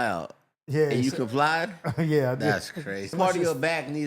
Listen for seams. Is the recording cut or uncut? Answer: cut